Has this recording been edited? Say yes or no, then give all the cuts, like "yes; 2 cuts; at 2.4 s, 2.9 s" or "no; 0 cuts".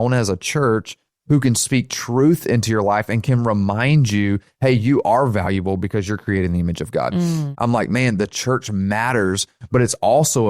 yes; 2 cuts; at 1.1 s, 7.5 s